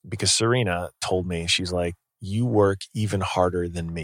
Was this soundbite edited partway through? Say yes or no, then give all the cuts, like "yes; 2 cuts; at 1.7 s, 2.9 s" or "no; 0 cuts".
no; 0 cuts